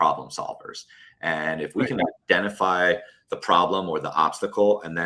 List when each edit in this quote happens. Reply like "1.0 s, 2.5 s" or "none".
none

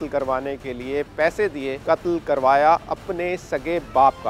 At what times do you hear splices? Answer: 1.7 s

